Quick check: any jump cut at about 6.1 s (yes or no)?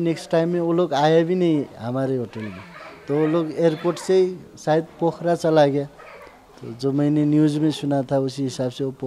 no